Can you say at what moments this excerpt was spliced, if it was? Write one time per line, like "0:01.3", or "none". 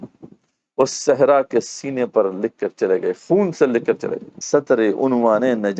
0:04.3